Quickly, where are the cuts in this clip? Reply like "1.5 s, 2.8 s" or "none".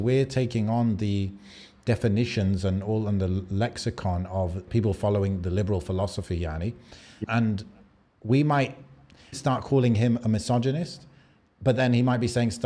4.7 s, 7.2 s, 9.3 s